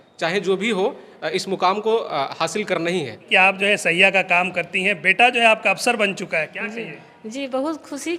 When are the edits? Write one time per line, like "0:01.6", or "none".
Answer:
0:03.3